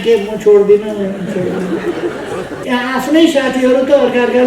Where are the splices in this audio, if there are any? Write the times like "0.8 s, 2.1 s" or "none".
2.5 s